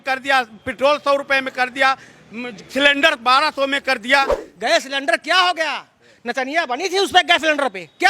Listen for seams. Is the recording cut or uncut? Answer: cut